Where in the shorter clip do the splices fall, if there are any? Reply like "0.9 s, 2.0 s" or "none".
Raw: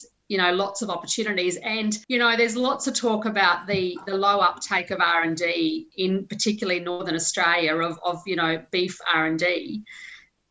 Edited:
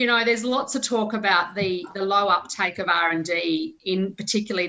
none